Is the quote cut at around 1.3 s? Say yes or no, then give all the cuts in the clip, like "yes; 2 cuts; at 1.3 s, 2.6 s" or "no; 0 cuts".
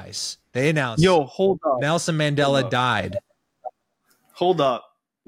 no; 0 cuts